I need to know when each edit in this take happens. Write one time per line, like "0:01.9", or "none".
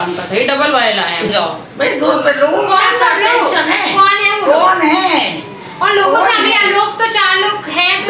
0:01.3